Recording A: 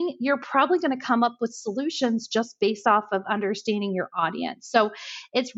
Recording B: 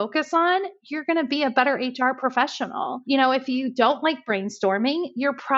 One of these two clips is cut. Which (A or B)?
B